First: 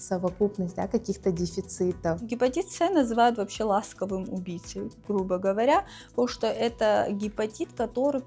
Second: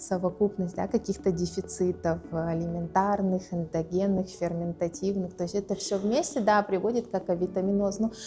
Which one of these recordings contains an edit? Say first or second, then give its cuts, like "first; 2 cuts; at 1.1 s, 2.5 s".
first; 1 cut; at 2.3 s